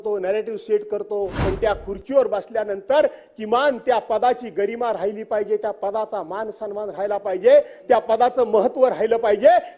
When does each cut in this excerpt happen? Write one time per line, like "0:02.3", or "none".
0:01.4